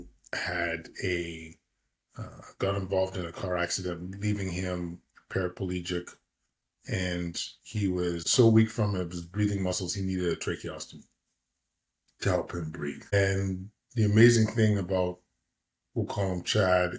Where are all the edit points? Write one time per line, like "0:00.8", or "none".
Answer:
0:08.2
0:13.1